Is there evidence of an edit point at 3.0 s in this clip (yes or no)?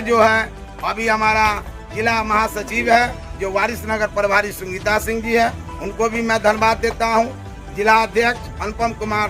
no